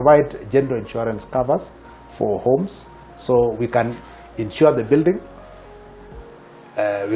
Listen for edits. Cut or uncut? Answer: uncut